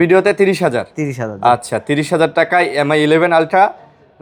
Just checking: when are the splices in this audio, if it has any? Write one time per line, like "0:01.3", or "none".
none

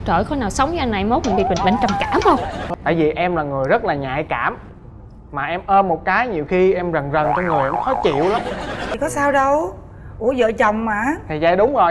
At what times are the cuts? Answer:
0:02.6
0:08.8

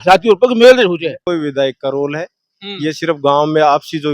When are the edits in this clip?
0:01.2

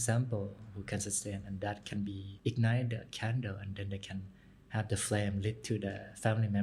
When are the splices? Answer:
0:02.3

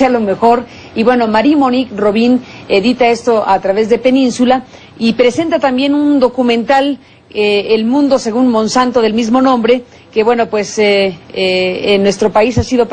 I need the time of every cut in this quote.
0:04.8

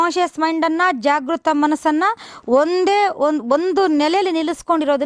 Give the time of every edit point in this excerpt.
none

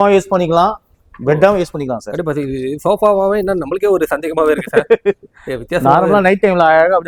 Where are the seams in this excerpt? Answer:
none

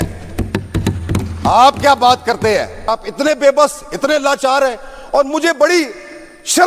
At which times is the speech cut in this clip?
none

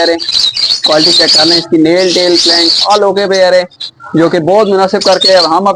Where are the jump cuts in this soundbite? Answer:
none

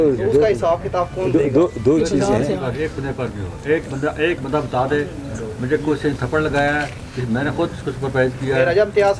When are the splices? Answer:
none

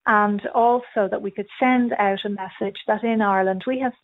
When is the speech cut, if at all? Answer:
none

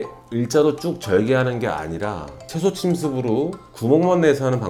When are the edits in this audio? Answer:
none

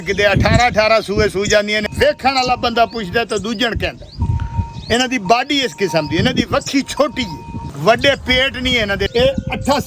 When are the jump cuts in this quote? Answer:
0:01.8
0:07.6
0:09.1

